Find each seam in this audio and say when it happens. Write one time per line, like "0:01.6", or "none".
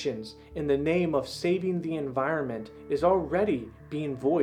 none